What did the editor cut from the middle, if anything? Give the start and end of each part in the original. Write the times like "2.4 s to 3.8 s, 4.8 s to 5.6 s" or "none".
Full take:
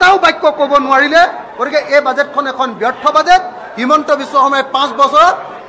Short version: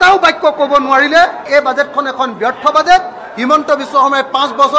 1.5 s to 1.9 s